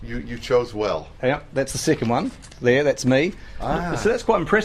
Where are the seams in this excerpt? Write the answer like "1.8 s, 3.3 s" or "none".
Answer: 1.7 s